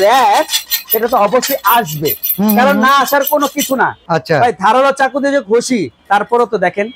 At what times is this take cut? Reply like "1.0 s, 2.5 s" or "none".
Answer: 4.0 s, 5.9 s